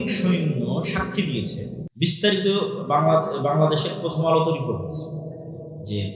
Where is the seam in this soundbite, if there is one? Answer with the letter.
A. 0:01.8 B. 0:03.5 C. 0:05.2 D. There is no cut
A